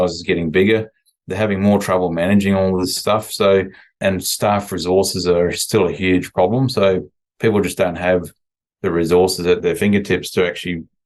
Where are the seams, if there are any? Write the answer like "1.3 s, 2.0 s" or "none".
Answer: 3.0 s, 4.0 s, 9.6 s